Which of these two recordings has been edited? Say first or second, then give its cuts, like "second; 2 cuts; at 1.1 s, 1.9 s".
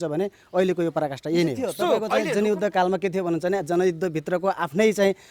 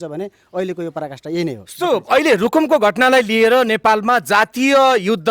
first; 1 cut; at 2.0 s